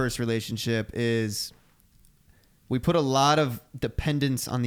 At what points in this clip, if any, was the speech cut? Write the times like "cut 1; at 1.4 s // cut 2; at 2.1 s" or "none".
none